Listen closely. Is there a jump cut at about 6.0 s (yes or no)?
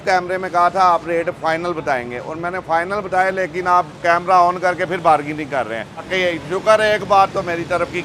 yes